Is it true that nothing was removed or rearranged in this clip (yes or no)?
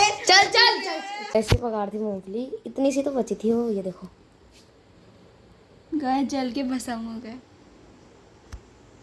no